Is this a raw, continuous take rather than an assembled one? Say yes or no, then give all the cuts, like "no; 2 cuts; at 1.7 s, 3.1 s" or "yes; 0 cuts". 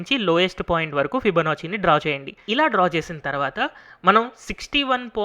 no; 1 cut; at 2.3 s